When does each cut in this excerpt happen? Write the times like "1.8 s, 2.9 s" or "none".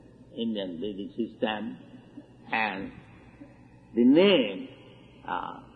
none